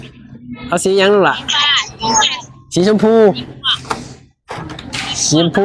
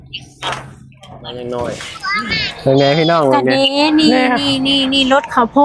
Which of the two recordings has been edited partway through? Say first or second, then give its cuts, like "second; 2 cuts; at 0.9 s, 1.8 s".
second; 1 cut; at 1.4 s